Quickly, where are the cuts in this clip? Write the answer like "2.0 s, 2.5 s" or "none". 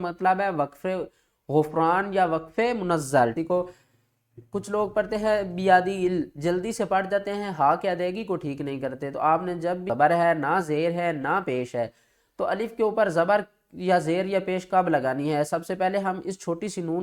3.3 s, 8.5 s, 9.9 s